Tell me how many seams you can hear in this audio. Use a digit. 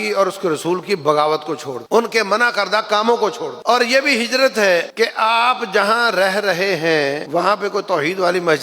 4